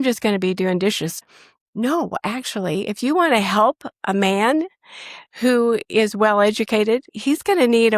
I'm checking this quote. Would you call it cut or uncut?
cut